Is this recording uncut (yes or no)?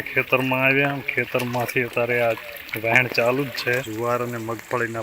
no